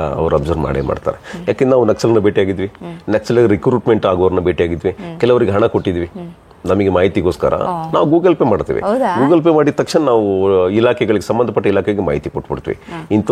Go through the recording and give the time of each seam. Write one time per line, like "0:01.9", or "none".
none